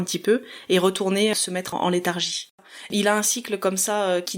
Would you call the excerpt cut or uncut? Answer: cut